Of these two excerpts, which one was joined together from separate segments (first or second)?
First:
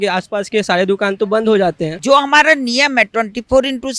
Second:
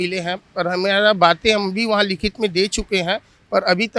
first